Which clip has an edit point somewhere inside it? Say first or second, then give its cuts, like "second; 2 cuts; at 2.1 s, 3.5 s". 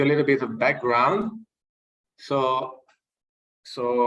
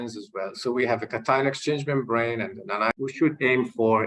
second; 1 cut; at 2.9 s